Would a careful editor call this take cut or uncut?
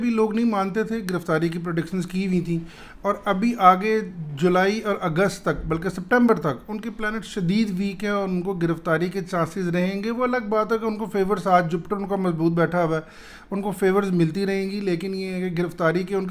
uncut